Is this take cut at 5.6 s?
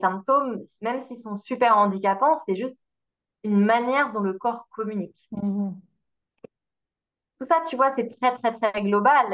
no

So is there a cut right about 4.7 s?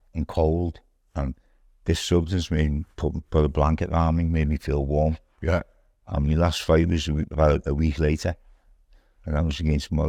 no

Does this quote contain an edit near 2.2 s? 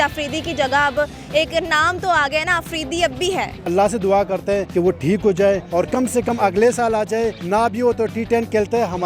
no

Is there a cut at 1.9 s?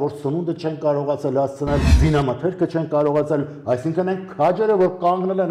yes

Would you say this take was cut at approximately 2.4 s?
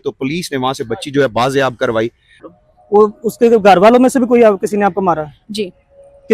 yes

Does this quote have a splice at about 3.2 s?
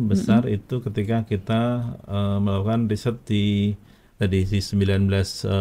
no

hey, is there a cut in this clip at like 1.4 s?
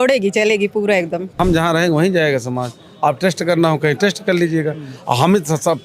yes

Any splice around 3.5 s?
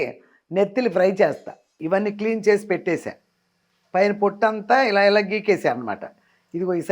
no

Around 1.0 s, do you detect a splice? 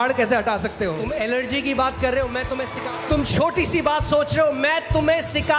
yes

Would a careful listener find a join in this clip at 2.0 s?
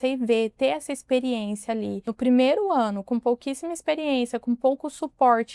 yes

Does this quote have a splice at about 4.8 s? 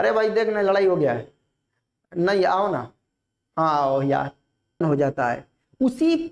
yes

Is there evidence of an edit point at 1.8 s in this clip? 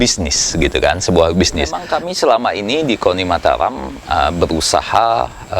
yes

